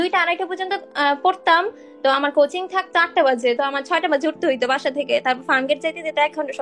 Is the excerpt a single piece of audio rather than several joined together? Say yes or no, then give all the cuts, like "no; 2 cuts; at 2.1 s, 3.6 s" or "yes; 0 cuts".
yes; 0 cuts